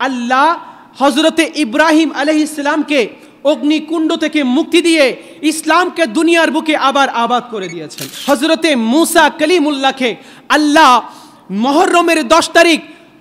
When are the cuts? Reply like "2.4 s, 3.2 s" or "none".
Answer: 4.7 s, 8.1 s